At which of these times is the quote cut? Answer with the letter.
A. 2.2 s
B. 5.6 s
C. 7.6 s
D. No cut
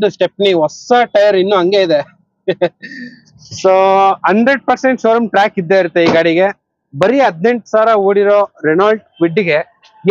D